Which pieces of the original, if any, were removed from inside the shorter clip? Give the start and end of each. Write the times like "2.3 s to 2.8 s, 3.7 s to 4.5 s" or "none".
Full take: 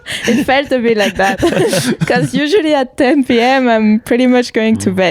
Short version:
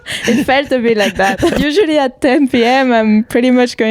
1.5 s to 2.3 s